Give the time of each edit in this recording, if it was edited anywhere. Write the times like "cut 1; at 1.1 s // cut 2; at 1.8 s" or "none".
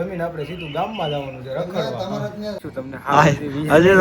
cut 1; at 2.6 s